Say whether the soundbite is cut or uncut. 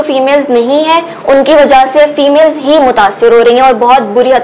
uncut